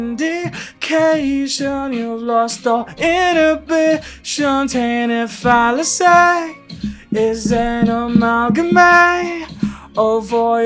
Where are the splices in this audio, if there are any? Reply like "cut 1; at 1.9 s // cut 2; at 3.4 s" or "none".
none